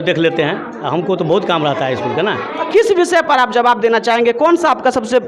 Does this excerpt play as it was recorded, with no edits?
no; 1 cut; at 2.6 s

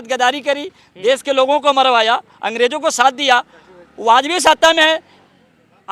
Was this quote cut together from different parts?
no; 0 cuts

